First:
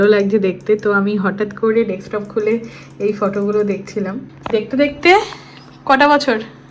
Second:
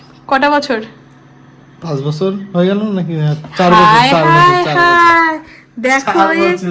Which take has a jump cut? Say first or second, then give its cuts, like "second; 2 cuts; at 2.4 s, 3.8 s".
first; 1 cut; at 4.3 s